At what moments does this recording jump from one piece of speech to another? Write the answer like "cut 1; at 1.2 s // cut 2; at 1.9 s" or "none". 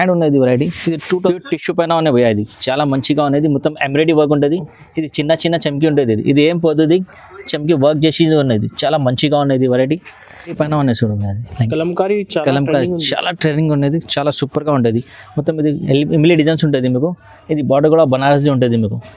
cut 1; at 1.3 s // cut 2; at 10.5 s